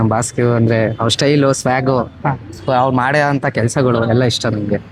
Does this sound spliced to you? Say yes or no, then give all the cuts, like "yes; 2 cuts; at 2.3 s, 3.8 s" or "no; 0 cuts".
no; 0 cuts